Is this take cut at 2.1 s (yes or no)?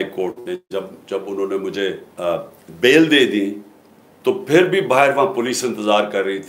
yes